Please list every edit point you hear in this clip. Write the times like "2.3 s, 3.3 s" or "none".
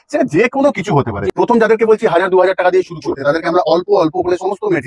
1.2 s